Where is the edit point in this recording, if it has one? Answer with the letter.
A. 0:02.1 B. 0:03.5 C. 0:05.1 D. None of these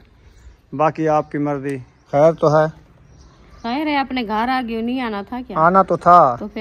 A